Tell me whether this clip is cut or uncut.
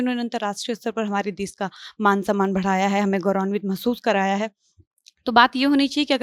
uncut